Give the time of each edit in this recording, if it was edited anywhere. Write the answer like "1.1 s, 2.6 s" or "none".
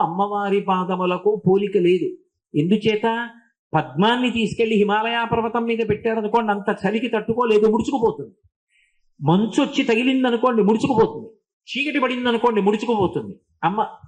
none